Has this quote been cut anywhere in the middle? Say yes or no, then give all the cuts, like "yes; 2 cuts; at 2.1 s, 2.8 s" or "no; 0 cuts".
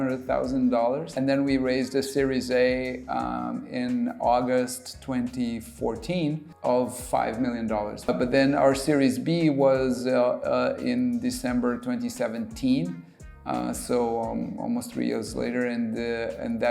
yes; 3 cuts; at 1.1 s, 6.5 s, 8.1 s